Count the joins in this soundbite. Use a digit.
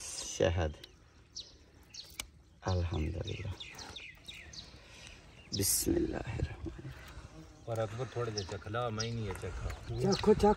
0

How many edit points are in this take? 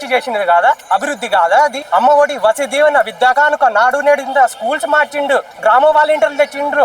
2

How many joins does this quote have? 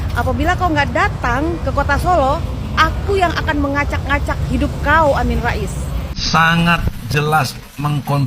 1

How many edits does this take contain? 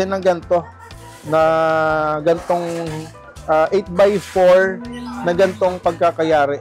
0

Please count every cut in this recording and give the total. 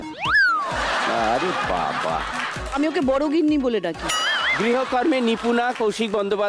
0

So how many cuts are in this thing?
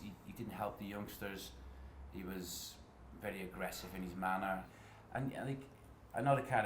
1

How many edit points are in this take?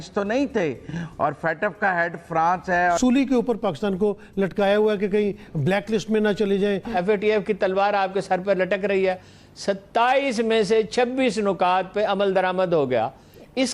2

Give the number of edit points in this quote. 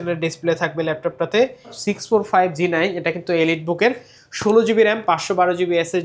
1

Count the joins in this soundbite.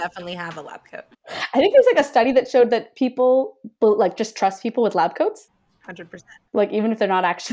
0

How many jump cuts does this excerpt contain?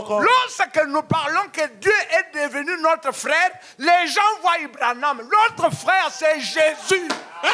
0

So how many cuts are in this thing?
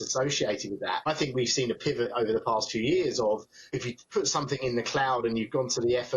2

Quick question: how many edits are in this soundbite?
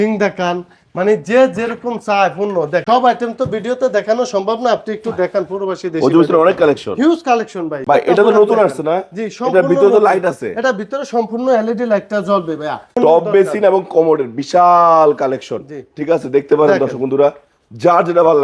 3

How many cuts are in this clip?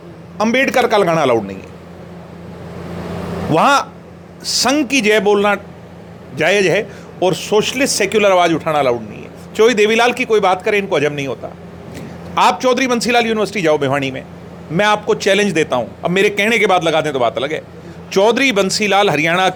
0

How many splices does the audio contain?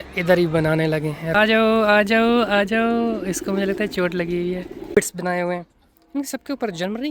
2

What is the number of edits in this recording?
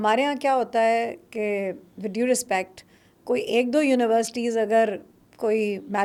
0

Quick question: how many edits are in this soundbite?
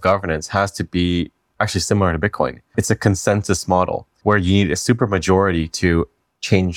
2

